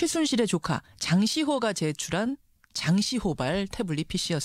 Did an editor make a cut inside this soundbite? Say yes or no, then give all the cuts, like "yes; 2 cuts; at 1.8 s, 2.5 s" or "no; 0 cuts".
no; 0 cuts